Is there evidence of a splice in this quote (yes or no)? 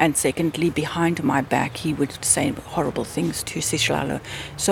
yes